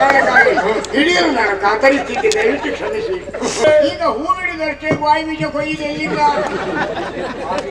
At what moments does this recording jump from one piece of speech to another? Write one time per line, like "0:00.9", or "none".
0:03.6